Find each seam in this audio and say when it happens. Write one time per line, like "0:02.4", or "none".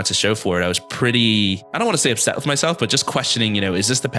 0:01.6